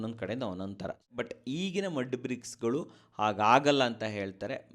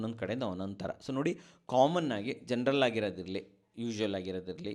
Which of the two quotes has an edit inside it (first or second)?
first